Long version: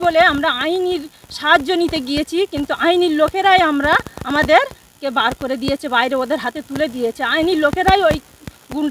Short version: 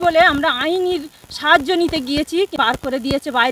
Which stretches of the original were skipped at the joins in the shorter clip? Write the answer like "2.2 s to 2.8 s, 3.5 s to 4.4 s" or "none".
2.5 s to 5.1 s